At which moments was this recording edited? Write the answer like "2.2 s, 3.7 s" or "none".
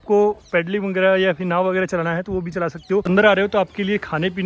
3.0 s